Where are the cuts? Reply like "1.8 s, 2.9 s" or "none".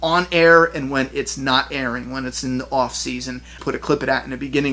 3.6 s